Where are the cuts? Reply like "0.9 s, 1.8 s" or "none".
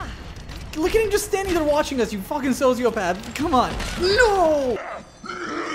4.8 s